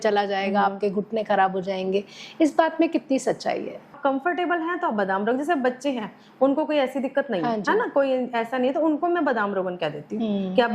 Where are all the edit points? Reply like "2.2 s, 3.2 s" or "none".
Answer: 3.9 s